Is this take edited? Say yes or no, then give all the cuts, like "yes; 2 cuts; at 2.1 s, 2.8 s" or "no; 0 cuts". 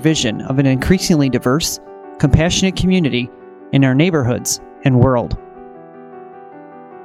yes; 1 cut; at 5.4 s